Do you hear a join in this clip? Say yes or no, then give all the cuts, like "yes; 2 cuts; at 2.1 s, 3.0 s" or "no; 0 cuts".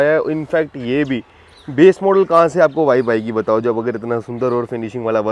no; 0 cuts